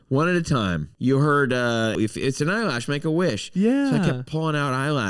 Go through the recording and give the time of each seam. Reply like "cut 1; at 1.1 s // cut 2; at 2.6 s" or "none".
cut 1; at 0.9 s // cut 2; at 2.0 s